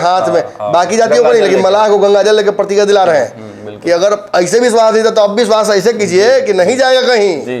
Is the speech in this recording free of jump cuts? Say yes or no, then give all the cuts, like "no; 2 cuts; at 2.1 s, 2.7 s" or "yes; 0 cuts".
yes; 0 cuts